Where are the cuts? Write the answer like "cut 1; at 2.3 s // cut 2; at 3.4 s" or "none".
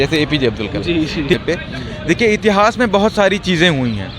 cut 1; at 1.3 s